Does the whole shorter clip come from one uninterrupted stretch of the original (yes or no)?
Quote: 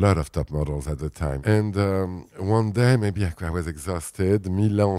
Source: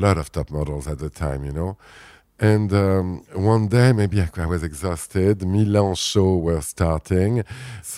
no